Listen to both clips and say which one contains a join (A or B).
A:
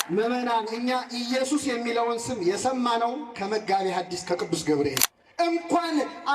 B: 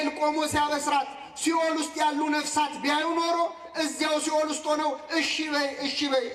A